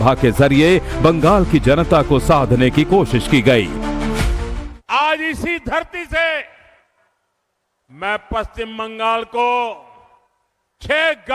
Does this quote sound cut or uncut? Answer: uncut